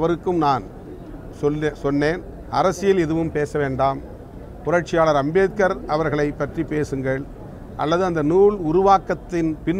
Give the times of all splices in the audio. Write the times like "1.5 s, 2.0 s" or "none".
2.3 s